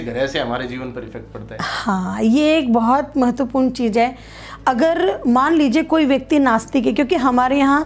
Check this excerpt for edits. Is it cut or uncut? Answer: uncut